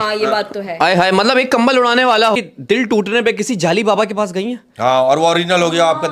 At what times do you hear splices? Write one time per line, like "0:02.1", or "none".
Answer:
0:02.4